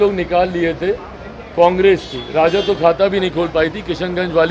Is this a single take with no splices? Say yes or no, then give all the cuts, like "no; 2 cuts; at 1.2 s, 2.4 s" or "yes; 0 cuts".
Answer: yes; 0 cuts